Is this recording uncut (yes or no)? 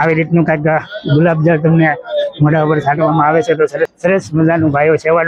no